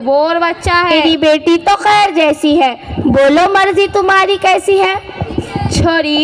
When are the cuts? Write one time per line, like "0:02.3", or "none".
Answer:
0:01.0